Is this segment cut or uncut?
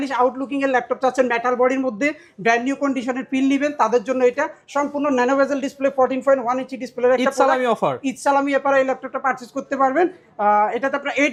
uncut